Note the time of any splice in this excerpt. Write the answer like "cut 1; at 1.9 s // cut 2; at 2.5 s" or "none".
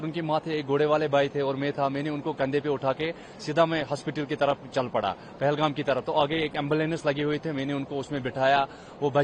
none